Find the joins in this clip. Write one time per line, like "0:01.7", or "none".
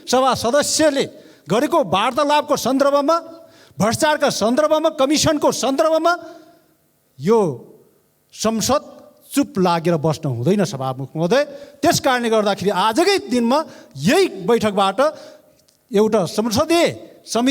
none